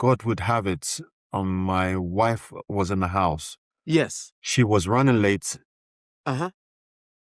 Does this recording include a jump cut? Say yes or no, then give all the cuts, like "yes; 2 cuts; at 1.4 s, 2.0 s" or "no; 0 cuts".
no; 0 cuts